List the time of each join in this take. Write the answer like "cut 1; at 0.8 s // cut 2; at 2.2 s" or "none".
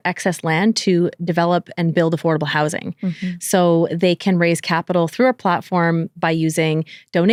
none